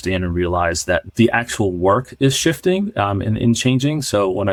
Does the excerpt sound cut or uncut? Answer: uncut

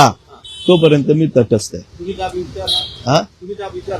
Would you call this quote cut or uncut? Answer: uncut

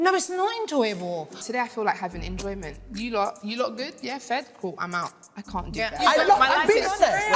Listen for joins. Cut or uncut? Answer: cut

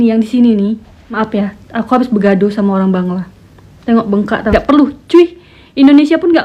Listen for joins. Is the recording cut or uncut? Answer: cut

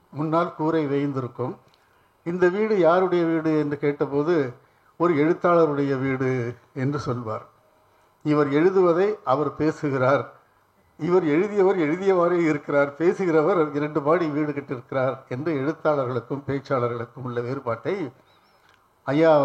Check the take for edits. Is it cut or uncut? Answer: uncut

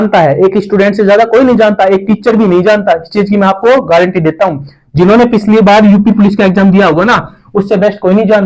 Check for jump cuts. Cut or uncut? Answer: uncut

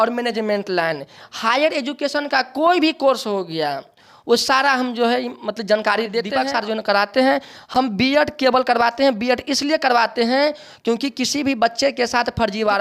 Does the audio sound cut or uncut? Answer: uncut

